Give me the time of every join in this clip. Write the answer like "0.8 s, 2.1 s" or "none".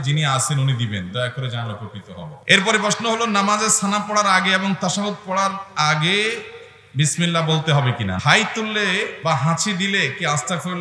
2.4 s, 8.2 s, 9.1 s